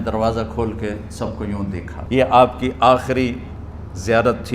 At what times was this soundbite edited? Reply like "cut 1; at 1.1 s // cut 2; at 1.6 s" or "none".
cut 1; at 1.9 s